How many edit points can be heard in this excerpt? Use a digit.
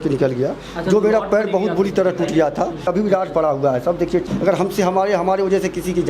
2